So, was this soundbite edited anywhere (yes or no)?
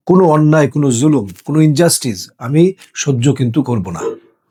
no